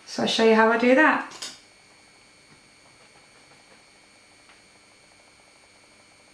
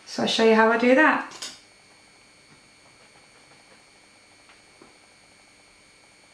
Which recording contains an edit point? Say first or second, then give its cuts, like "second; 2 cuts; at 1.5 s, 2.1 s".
first; 1 cut; at 4.6 s